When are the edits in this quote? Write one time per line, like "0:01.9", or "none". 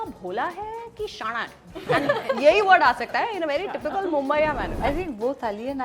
0:04.7